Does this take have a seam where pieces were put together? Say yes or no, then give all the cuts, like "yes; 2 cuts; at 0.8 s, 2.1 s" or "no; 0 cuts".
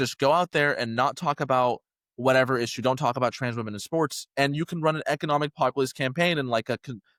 no; 0 cuts